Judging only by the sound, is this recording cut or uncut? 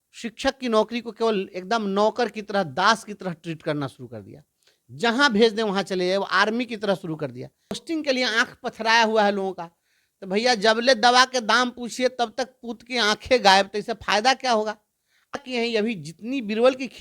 cut